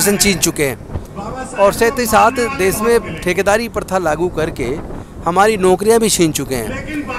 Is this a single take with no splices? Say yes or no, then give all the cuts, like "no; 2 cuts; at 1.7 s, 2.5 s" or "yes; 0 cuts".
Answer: yes; 0 cuts